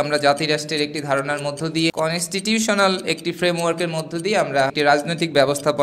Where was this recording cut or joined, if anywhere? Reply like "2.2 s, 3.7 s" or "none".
1.9 s, 4.7 s